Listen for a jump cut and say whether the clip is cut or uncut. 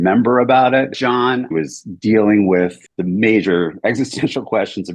cut